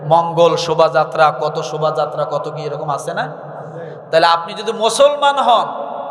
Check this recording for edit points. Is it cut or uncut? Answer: uncut